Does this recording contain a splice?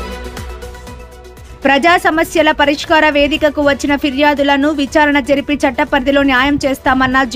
yes; 1 cut; at 1.4 s

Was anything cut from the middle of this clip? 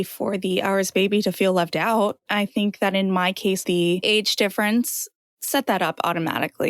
yes; 2 cuts; at 2.2 s, 3.6 s

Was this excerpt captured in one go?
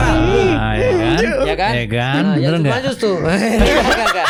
yes; 0 cuts

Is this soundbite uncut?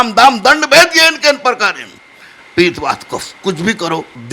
yes; 0 cuts

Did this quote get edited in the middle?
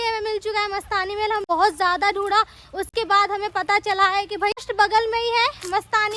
yes; 2 cuts; at 1.4 s, 4.7 s

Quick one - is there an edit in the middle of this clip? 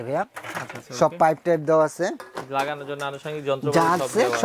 no; 0 cuts

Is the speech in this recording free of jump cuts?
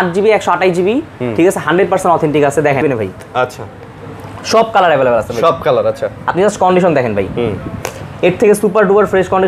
no; 1 cut; at 2.8 s

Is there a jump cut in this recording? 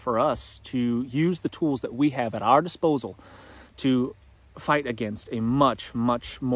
no; 0 cuts

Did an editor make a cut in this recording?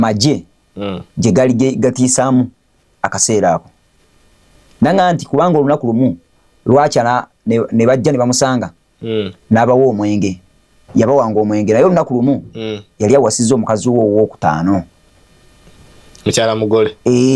no; 0 cuts

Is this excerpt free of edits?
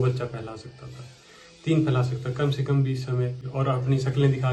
no; 1 cut; at 3.5 s

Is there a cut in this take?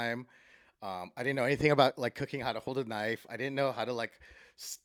no; 0 cuts

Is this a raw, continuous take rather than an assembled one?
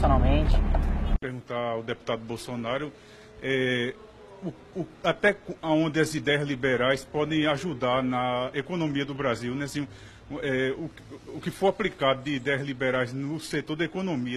no; 1 cut; at 12.0 s

